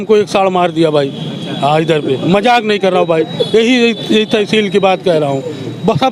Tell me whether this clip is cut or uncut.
uncut